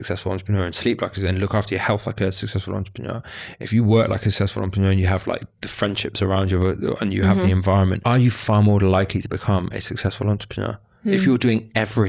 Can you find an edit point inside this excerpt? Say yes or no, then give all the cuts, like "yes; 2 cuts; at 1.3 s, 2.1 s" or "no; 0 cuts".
yes; 2 cuts; at 8.0 s, 10.8 s